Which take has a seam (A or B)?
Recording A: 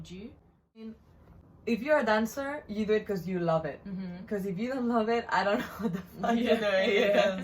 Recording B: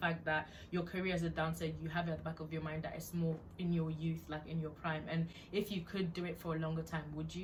A